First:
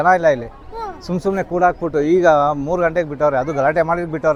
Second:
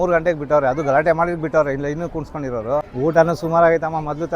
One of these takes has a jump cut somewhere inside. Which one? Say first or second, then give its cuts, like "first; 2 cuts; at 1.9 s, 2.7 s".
second; 1 cut; at 2.9 s